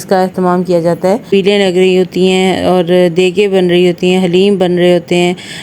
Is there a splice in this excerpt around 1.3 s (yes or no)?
yes